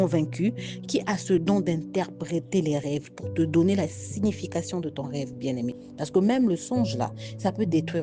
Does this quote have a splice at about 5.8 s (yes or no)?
yes